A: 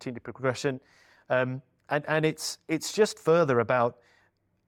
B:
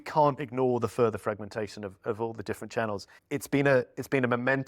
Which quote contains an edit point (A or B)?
B